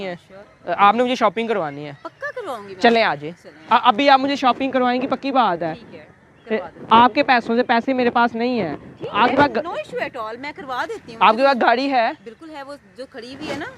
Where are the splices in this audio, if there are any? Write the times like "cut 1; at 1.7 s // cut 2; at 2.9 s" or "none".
none